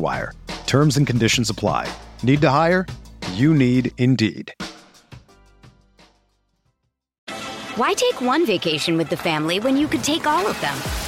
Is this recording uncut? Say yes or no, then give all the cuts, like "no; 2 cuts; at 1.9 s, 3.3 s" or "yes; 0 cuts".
no; 1 cut; at 7.1 s